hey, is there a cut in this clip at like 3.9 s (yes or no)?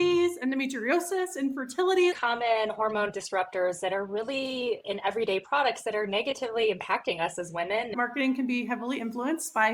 no